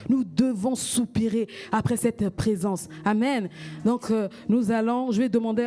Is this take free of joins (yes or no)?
yes